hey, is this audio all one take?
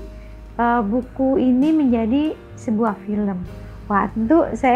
yes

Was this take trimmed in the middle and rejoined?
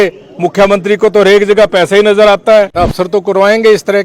yes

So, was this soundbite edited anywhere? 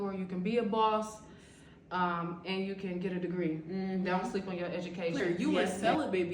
yes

